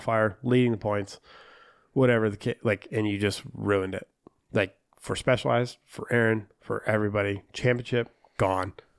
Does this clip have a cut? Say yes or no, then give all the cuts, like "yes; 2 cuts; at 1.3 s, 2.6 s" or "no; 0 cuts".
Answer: no; 0 cuts